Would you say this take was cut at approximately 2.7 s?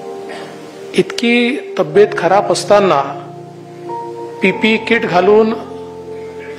no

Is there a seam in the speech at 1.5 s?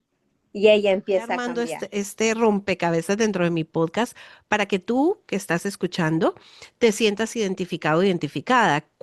yes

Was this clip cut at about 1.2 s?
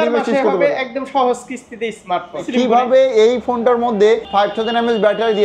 no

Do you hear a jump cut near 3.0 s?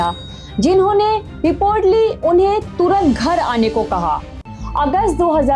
no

